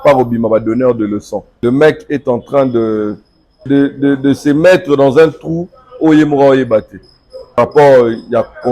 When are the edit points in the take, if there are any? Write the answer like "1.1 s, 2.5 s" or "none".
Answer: 1.4 s, 3.7 s, 7.6 s